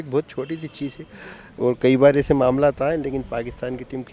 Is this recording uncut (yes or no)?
yes